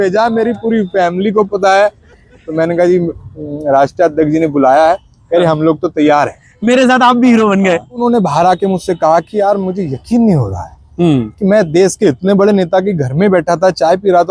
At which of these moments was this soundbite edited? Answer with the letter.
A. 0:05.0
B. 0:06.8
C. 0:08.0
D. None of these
C